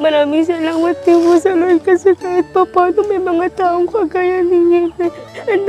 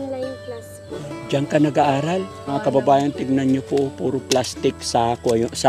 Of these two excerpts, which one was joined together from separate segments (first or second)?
second